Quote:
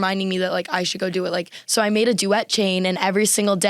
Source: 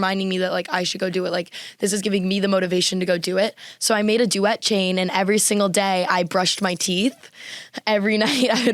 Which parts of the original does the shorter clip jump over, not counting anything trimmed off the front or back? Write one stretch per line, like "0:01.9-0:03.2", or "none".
0:01.6-0:03.7